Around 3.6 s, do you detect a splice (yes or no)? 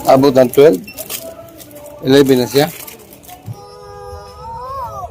yes